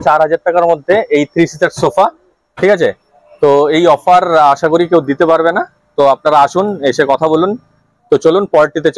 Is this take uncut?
yes; 0 cuts

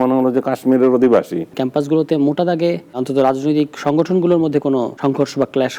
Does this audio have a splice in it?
yes; 3 cuts; at 1.6 s, 3.0 s, 4.9 s

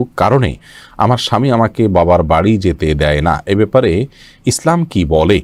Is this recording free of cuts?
yes; 0 cuts

